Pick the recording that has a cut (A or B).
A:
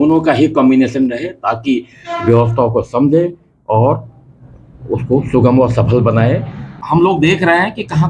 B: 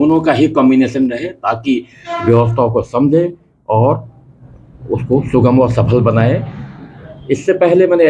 A